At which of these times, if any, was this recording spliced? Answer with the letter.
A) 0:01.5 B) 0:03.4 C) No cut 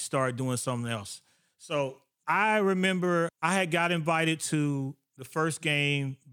B